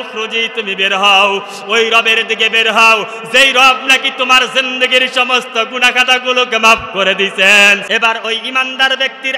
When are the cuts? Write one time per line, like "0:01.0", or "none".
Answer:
0:07.8